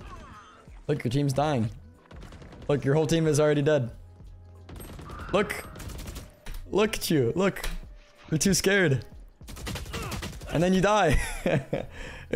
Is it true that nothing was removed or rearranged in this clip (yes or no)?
yes